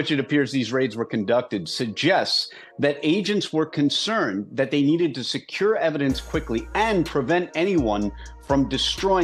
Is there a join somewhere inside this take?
no; 0 cuts

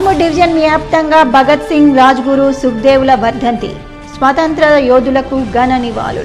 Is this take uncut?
yes; 0 cuts

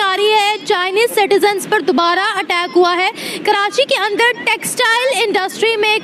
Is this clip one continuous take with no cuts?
yes; 0 cuts

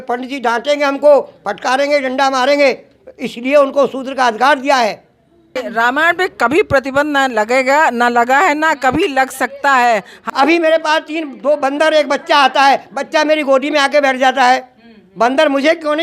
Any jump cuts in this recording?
yes; 2 cuts; at 5.5 s, 10.2 s

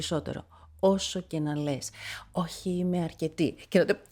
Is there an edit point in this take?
no; 0 cuts

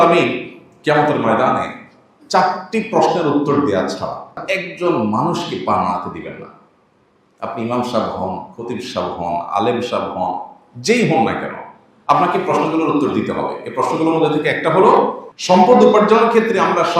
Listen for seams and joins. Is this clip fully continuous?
no; 2 cuts; at 4.4 s, 15.3 s

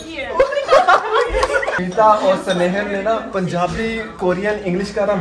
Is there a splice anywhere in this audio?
yes; 3 cuts; at 1.7 s, 3.3 s, 4.1 s

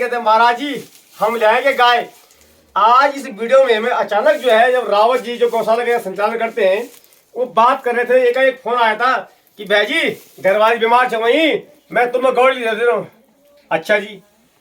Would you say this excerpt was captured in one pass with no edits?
yes; 0 cuts

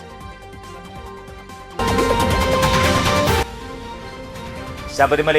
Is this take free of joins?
no; 1 cut; at 1.7 s

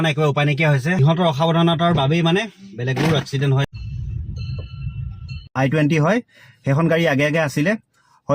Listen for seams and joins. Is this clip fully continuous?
no; 3 cuts; at 1.0 s, 3.7 s, 5.5 s

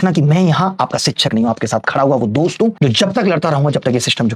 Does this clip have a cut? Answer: no; 0 cuts

